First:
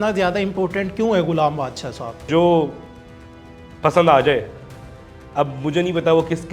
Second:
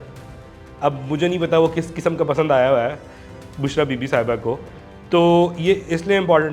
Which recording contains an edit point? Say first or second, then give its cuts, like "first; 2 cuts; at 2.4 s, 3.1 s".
first; 1 cut; at 2.3 s